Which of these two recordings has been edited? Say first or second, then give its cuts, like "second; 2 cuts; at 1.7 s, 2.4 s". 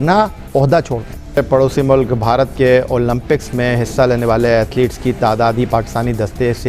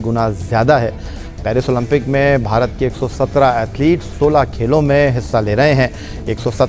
first; 1 cut; at 1.4 s